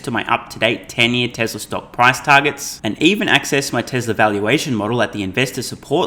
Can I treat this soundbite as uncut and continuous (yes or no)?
yes